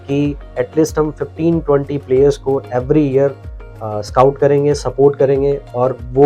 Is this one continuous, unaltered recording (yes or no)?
yes